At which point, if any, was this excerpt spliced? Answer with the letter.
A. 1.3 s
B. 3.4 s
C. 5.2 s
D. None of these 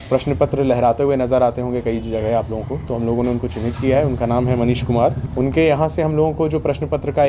C